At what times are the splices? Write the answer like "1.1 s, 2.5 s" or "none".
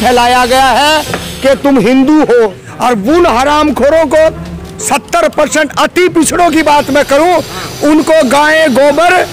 2.7 s